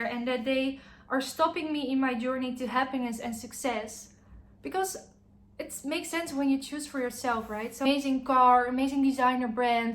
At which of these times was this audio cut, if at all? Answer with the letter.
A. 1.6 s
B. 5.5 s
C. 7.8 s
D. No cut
C